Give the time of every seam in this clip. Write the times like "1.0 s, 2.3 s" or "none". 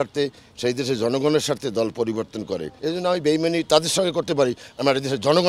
2.7 s